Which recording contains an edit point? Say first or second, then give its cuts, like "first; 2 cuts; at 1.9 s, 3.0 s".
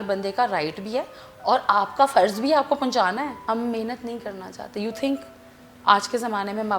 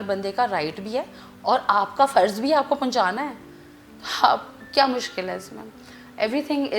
first; 1 cut; at 3.4 s